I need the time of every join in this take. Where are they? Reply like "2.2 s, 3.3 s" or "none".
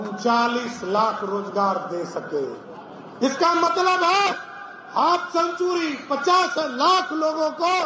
none